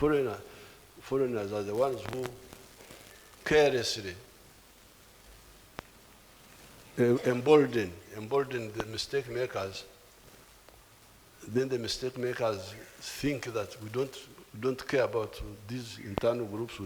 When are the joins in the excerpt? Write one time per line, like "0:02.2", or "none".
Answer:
none